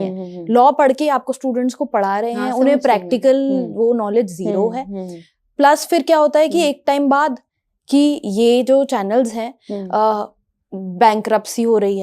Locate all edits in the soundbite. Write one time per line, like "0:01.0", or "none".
none